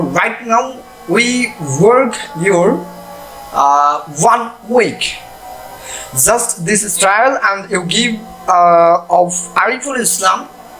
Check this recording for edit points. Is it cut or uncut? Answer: uncut